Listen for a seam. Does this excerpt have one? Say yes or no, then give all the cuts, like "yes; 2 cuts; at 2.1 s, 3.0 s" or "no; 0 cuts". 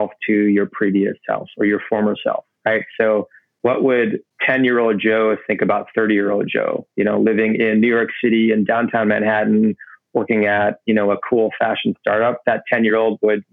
yes; 2 cuts; at 3.4 s, 4.3 s